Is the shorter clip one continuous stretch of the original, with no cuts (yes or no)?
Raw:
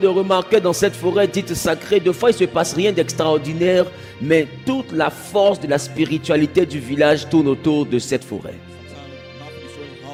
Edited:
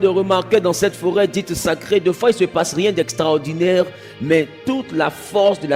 yes